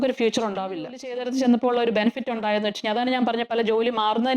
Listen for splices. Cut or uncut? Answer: cut